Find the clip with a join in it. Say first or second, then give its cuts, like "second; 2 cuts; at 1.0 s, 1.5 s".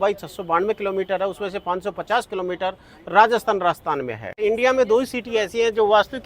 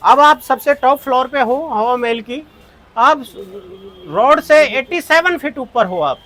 first; 1 cut; at 4.4 s